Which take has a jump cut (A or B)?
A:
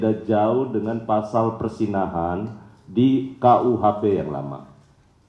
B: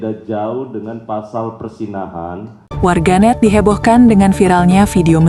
B